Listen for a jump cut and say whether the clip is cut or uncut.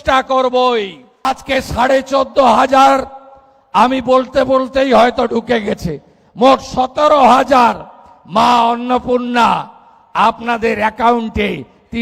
cut